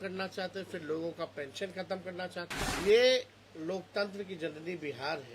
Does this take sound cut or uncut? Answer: cut